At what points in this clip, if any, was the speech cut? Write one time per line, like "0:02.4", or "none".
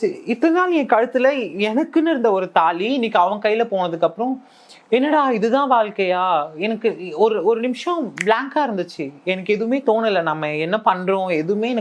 none

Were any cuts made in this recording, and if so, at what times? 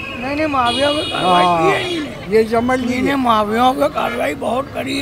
none

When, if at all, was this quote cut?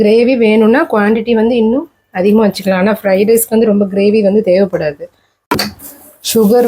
0:05.4

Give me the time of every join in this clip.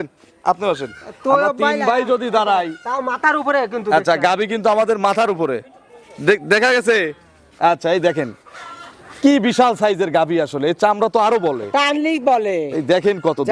none

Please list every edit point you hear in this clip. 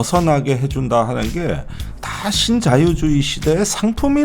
none

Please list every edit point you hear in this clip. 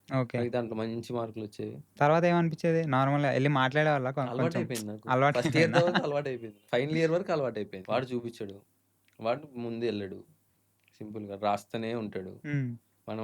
0:06.5
0:07.8

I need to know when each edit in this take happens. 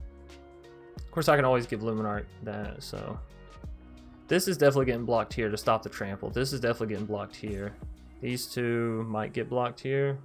none

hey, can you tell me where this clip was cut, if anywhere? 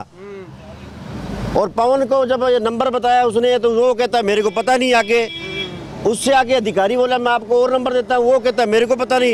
none

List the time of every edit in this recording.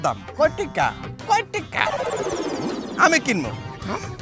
none

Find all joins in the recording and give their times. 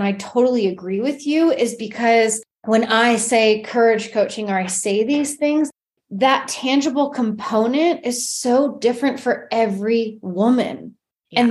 0:02.5

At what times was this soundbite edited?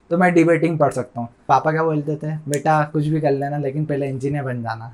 0:01.4

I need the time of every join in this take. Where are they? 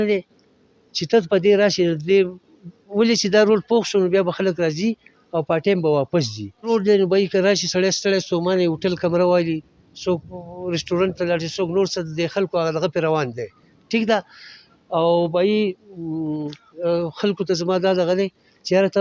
none

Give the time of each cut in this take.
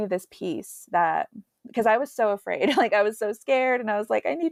none

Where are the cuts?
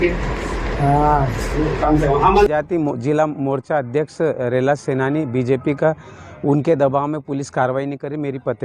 0:02.5

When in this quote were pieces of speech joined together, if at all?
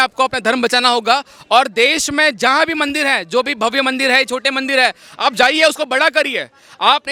none

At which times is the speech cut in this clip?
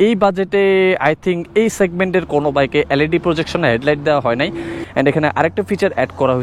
0:04.8

